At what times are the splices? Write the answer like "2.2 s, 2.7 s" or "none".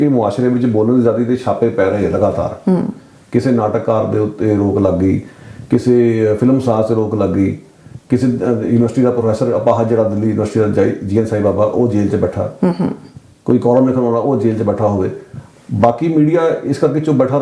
none